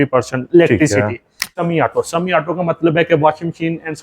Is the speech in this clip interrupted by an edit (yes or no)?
yes